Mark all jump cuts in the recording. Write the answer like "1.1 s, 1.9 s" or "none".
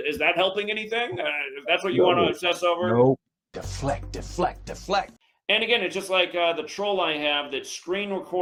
none